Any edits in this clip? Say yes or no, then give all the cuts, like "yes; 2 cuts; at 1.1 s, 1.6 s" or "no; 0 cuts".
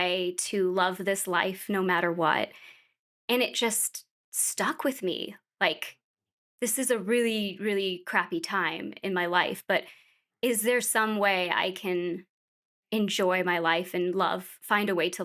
no; 0 cuts